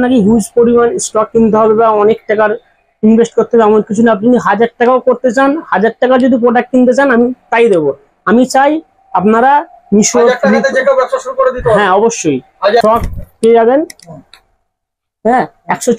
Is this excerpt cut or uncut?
cut